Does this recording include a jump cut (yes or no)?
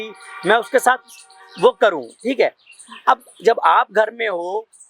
no